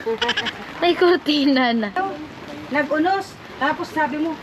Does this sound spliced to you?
yes; 1 cut; at 2.0 s

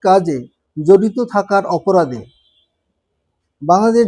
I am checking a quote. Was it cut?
no; 0 cuts

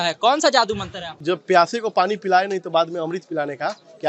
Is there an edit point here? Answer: yes; 1 cut; at 1.1 s

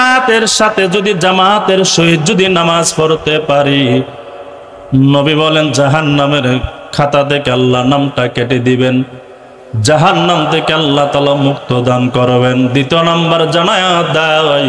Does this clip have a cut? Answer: no; 0 cuts

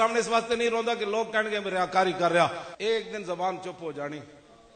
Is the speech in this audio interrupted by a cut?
yes; 1 cut; at 2.7 s

